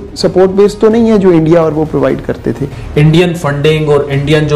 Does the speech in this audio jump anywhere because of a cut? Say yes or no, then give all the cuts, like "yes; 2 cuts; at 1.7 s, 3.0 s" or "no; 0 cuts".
yes; 1 cut; at 2.8 s